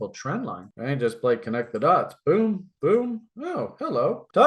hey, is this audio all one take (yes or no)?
yes